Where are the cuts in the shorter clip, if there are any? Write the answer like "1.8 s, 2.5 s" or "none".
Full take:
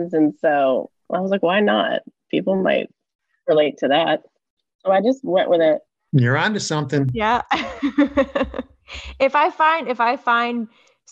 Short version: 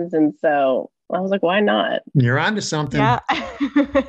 2.1 s, 3.0 s